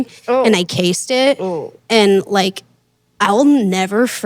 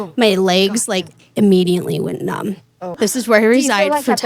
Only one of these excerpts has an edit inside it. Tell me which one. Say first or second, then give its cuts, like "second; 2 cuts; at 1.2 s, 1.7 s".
second; 1 cut; at 3.0 s